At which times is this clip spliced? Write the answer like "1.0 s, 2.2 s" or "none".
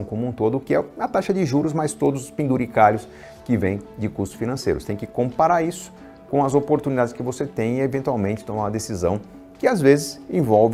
none